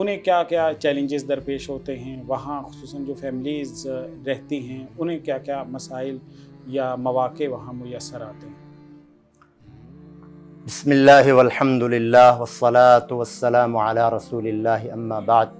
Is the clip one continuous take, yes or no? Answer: yes